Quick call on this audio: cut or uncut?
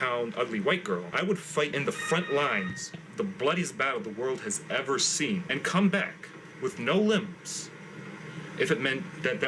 cut